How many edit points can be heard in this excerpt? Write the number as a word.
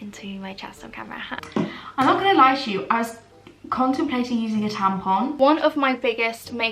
two